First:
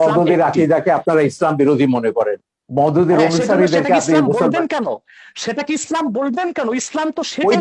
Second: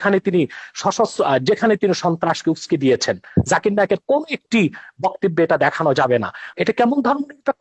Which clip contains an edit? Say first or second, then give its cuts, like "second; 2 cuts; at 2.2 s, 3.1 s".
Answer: second; 1 cut; at 6.5 s